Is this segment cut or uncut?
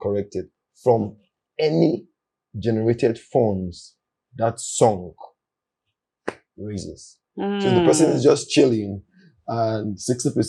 uncut